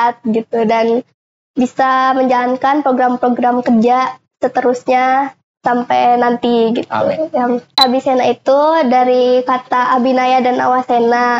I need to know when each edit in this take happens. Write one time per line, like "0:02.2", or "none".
0:07.8

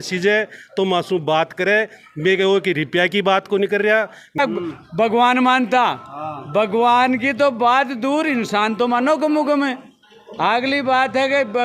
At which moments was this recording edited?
0:04.4

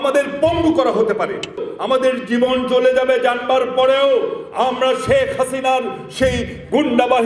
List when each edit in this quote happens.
0:01.7

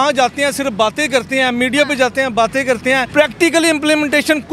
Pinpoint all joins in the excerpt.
none

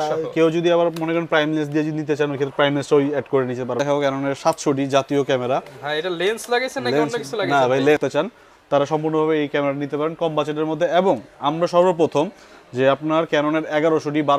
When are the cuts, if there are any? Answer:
0:03.8
0:08.0

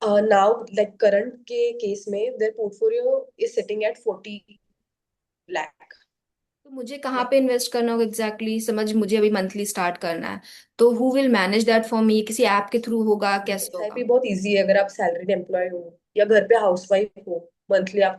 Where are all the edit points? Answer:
0:06.9
0:13.9

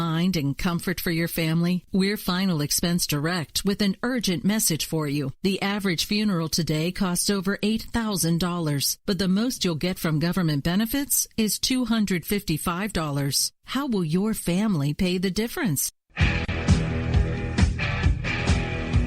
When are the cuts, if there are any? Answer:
0:16.1

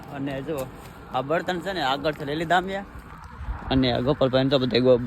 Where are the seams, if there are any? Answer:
none

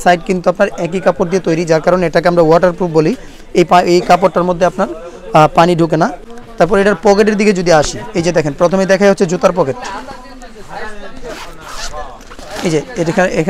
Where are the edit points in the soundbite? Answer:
none

